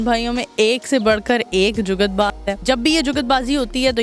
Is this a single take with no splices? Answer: no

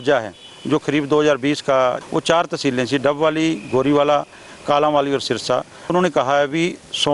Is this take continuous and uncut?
no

